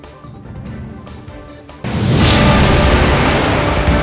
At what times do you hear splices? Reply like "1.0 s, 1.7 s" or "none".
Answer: 1.2 s

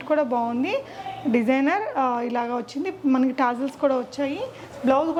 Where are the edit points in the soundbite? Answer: none

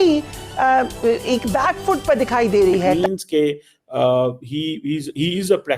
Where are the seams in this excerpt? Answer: 3.0 s

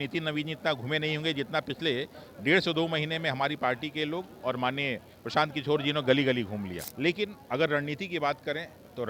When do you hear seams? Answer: 6.8 s

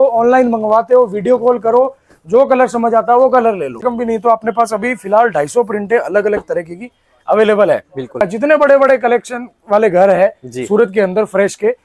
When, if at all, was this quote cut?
3.8 s, 8.2 s

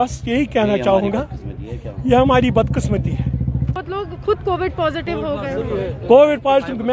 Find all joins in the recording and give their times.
3.8 s

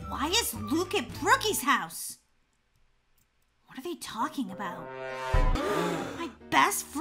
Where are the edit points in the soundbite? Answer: 5.5 s

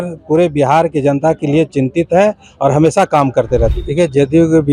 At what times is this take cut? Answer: 3.8 s

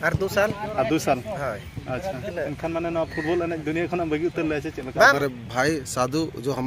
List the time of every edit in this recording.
2.3 s, 5.1 s

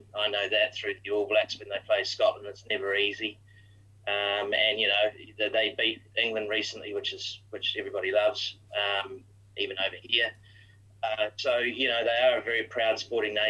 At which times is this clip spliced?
none

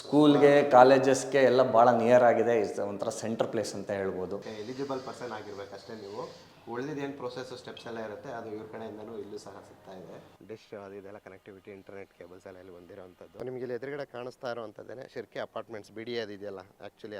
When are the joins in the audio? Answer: 4.4 s, 10.3 s, 13.3 s

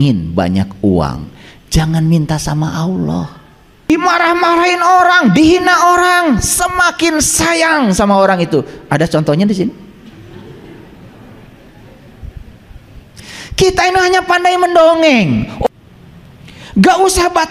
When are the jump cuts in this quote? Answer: 3.9 s, 15.7 s

